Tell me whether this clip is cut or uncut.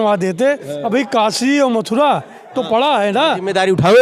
uncut